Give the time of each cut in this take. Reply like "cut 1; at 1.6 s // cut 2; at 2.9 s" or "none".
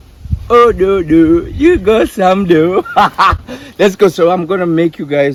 none